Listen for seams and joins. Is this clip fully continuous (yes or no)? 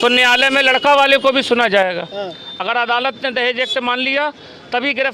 yes